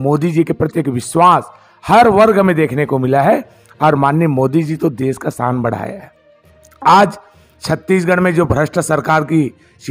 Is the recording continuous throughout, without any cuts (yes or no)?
yes